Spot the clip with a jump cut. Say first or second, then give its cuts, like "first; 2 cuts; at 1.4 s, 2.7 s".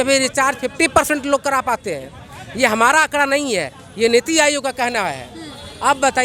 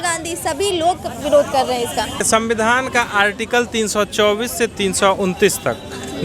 second; 1 cut; at 2.3 s